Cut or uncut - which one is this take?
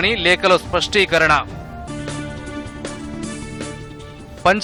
uncut